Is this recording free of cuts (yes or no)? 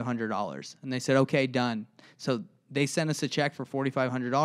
yes